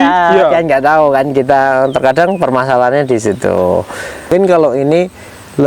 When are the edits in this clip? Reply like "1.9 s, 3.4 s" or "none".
4.3 s